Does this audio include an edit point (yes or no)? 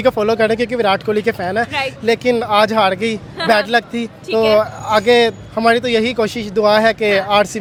no